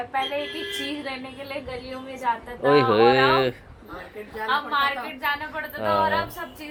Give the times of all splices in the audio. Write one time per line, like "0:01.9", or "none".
none